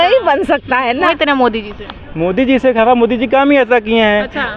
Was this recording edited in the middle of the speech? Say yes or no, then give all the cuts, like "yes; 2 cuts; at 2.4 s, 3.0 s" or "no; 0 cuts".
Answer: yes; 1 cut; at 1.1 s